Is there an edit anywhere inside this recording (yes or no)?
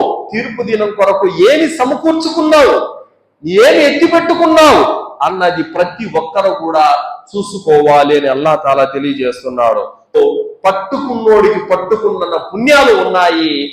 yes